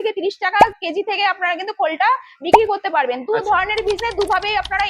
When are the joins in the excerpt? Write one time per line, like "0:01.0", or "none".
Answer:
none